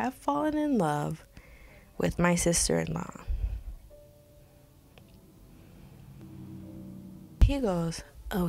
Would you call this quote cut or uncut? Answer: cut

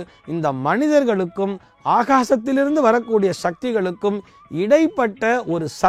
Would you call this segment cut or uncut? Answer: uncut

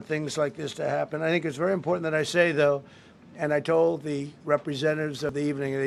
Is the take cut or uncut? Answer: uncut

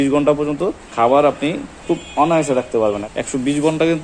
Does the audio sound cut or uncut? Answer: cut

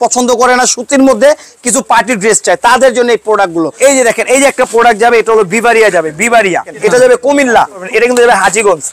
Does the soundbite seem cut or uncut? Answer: cut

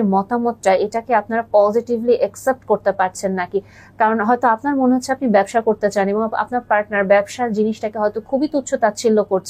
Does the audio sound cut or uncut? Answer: uncut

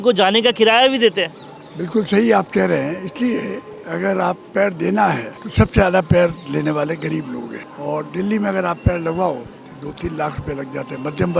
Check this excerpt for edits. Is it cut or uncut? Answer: cut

